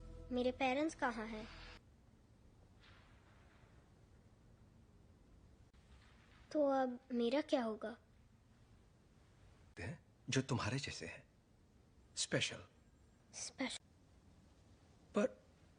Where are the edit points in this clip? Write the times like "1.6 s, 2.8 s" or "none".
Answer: 1.8 s